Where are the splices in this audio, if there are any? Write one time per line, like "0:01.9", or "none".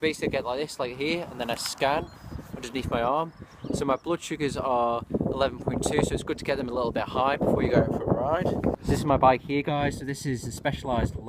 none